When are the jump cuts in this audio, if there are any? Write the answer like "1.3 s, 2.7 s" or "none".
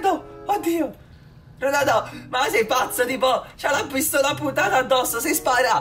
none

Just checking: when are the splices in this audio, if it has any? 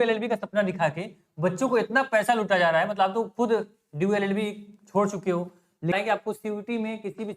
5.9 s

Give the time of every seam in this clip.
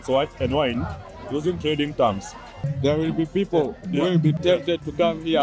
2.6 s, 4.4 s

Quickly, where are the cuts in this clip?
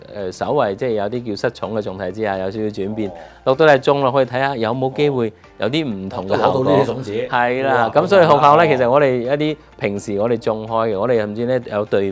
none

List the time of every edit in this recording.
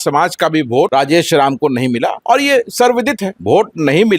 0.9 s, 2.2 s, 3.3 s

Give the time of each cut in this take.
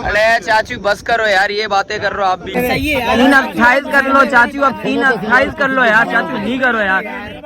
2.6 s

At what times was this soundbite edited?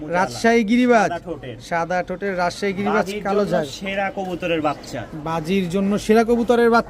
none

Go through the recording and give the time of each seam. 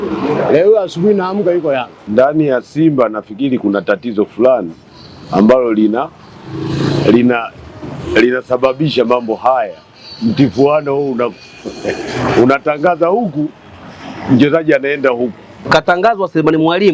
2.0 s, 15.6 s

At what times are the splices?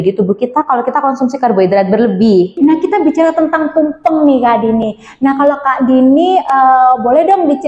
2.5 s

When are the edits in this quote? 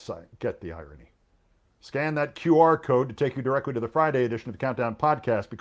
1.2 s

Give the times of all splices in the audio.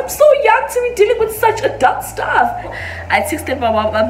2.8 s

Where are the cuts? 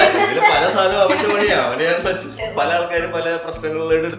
2.4 s

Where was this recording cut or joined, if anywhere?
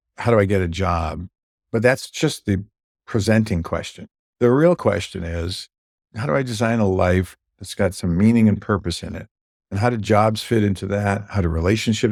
none

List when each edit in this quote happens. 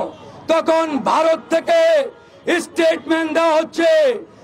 none

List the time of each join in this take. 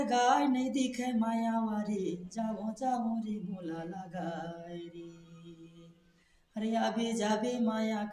none

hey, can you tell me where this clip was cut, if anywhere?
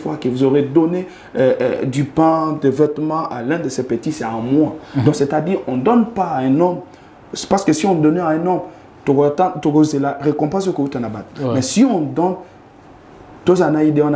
none

